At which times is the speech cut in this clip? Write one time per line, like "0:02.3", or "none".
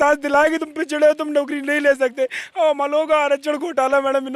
none